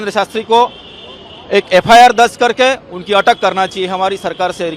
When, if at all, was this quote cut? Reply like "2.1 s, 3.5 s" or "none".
none